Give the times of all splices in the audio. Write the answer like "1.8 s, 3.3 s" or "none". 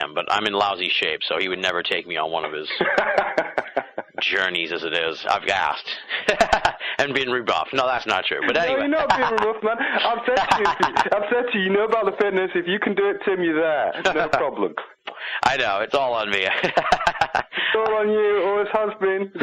none